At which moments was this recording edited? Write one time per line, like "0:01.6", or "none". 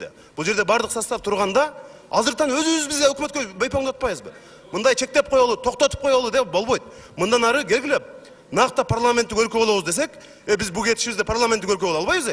none